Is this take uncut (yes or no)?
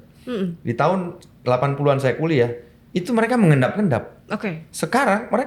yes